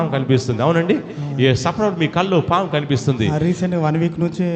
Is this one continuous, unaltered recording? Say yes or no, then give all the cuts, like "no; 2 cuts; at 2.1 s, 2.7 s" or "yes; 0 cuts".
yes; 0 cuts